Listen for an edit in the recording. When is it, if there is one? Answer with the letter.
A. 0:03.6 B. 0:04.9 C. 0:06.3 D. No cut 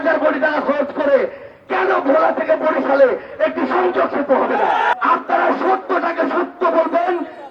B